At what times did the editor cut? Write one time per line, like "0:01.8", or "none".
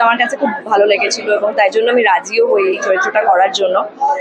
none